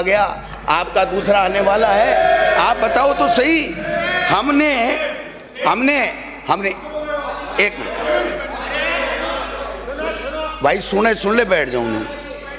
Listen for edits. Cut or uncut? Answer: uncut